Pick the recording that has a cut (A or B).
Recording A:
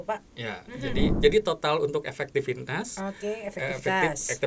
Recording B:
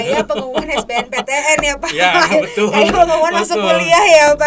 A